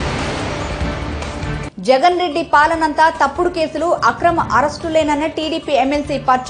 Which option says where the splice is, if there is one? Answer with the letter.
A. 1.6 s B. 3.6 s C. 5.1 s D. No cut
A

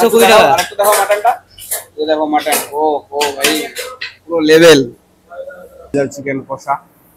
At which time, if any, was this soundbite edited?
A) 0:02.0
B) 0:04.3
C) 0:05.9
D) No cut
C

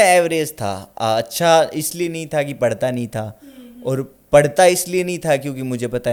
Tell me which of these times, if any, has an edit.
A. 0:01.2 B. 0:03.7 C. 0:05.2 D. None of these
D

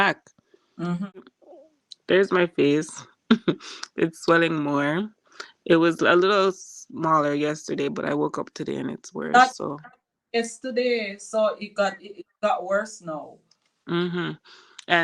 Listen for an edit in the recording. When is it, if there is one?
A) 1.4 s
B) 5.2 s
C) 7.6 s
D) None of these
A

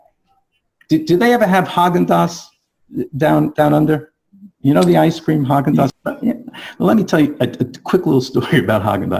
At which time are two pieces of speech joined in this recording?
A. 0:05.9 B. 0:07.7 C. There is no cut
A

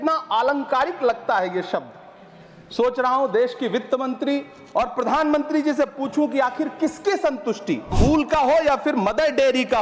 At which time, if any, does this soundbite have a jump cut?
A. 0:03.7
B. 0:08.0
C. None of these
B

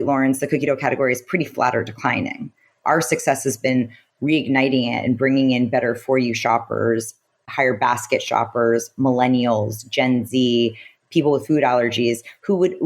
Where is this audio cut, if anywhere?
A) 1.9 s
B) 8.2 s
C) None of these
C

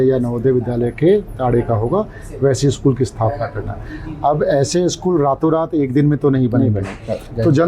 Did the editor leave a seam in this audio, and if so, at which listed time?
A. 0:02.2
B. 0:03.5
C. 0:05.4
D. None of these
D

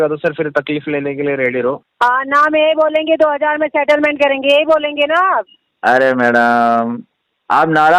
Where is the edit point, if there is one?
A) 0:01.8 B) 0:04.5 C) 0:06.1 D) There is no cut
A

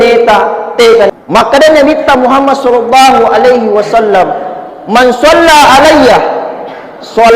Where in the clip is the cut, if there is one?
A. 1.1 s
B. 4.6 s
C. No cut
A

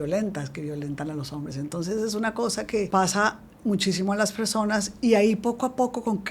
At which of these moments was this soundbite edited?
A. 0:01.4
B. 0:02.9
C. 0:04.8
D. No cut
B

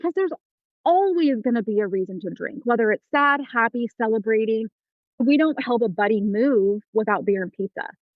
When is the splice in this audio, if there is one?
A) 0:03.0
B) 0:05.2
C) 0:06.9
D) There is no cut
B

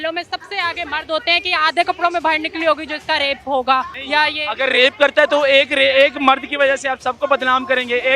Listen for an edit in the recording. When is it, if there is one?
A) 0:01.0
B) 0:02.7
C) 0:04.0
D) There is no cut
C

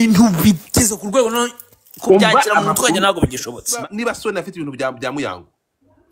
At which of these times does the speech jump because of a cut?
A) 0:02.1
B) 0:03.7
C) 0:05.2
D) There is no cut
B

